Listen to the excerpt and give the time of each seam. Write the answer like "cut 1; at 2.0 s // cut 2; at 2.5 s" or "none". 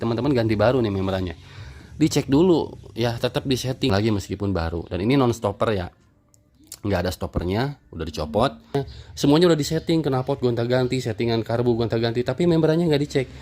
cut 1; at 3.9 s // cut 2; at 8.7 s